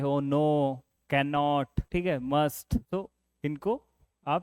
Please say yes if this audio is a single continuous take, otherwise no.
no